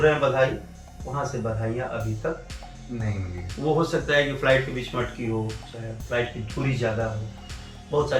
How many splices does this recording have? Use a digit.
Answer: 0